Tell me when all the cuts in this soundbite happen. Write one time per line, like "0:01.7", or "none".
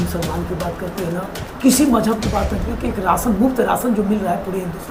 none